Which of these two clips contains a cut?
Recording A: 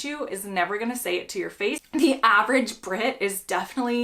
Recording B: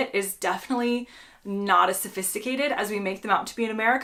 A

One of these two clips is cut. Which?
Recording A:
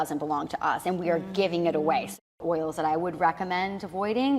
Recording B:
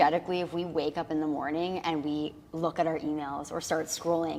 A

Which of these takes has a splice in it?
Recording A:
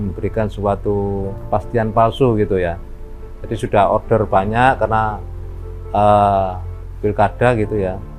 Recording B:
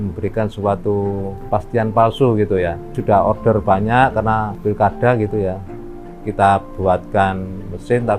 B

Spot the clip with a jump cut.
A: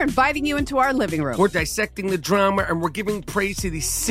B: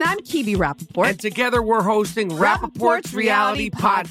A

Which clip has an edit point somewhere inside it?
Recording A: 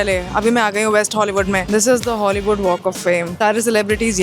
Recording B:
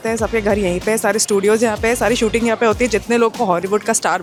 A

